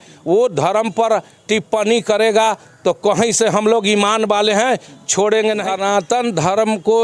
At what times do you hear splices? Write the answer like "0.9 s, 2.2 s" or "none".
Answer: 5.7 s

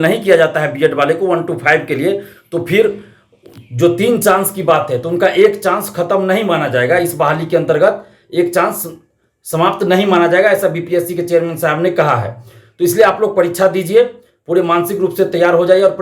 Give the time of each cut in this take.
none

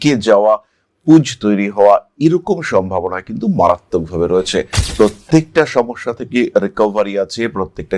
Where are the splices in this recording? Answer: 4.8 s

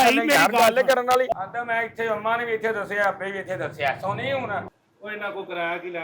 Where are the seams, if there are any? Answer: 1.3 s, 4.7 s

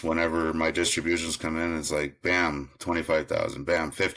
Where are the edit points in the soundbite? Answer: none

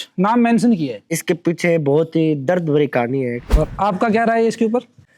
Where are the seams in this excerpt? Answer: 1.1 s, 3.4 s

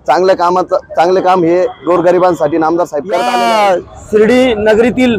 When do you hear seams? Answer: 3.2 s

